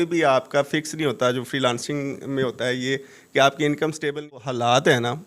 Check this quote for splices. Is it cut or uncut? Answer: cut